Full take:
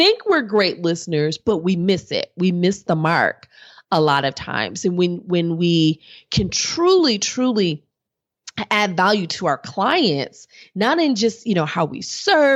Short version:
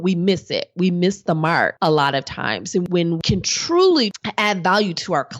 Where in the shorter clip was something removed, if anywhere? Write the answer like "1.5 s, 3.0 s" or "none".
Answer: 1.7 s, 2.9 s, 4.2 s